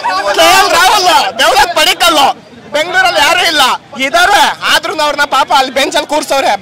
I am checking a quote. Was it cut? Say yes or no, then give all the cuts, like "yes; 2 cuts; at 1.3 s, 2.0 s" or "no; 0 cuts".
no; 0 cuts